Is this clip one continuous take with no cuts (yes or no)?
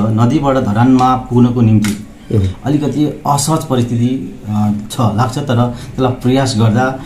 yes